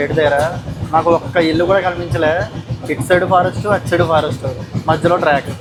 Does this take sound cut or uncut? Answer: uncut